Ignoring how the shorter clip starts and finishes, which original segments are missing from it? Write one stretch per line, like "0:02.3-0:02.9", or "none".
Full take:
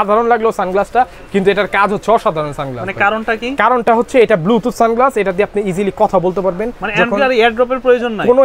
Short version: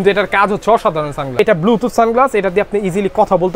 0:02.8-0:04.2